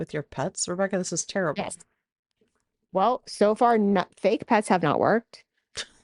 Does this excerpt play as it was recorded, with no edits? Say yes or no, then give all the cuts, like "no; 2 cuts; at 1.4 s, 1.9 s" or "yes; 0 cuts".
yes; 0 cuts